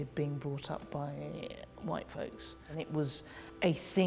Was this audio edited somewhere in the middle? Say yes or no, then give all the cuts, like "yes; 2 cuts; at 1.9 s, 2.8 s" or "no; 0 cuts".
yes; 1 cut; at 3.0 s